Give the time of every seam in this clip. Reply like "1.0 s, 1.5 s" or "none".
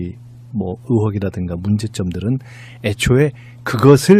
none